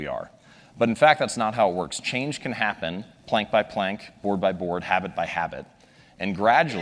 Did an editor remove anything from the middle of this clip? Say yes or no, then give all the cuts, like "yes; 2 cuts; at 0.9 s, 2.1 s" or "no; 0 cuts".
no; 0 cuts